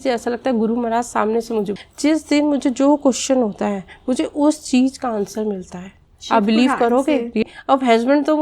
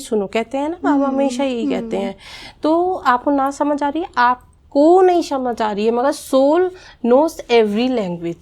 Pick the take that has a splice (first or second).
first